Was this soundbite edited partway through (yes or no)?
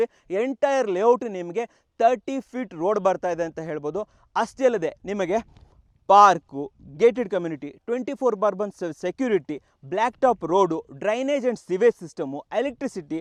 no